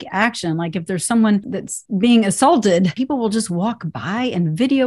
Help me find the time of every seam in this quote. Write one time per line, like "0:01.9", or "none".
0:01.6
0:03.0